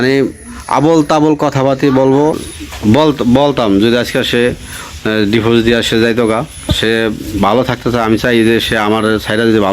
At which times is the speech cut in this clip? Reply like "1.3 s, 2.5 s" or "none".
2.4 s